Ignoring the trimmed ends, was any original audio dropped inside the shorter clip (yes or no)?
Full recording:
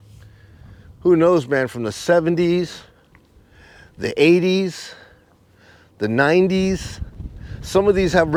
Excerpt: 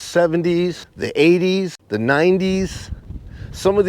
yes